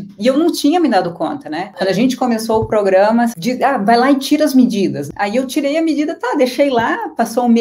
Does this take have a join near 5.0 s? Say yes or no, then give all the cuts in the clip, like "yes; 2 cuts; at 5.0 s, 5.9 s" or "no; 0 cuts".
yes; 3 cuts; at 1.7 s, 3.3 s, 5.0 s